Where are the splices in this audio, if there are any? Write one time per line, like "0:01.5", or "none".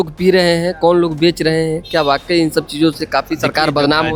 none